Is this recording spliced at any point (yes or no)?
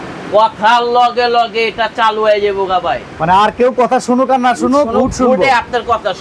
no